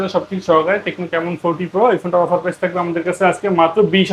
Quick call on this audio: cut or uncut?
uncut